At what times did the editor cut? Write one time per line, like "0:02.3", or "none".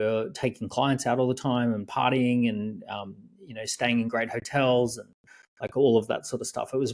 none